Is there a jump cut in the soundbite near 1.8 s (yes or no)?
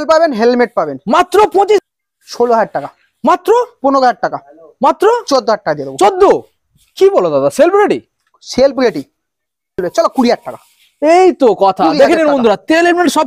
yes